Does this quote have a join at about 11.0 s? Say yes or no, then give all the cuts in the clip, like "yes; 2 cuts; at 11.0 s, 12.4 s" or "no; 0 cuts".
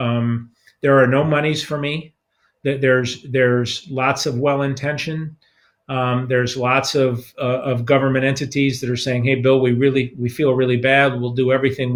no; 0 cuts